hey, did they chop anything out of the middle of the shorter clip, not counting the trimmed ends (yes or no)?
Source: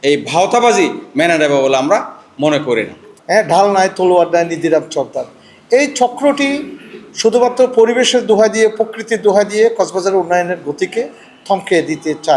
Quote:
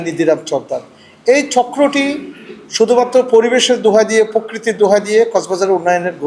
no